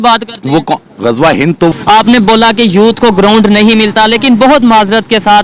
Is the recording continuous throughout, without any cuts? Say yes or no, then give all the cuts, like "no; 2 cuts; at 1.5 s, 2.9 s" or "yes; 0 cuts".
no; 1 cut; at 1.7 s